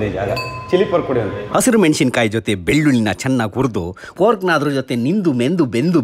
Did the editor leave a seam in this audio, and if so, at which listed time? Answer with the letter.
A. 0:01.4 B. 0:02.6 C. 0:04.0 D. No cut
A